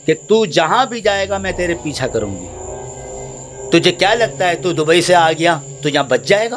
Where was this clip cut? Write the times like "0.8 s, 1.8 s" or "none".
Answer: none